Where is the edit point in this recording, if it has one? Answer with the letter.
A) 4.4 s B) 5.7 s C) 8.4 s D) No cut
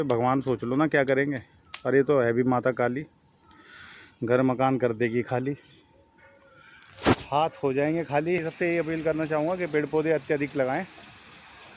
C